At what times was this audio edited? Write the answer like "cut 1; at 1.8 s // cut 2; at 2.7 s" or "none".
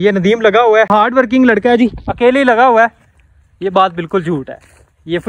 cut 1; at 0.9 s